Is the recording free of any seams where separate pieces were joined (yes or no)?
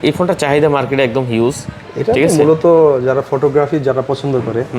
yes